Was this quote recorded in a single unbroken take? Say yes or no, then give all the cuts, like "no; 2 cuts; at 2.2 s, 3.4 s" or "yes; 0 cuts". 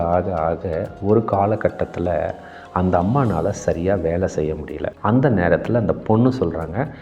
no; 1 cut; at 4.9 s